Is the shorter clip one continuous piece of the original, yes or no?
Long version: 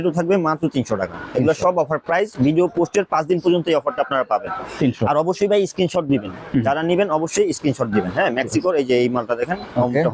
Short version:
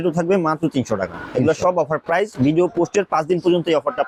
yes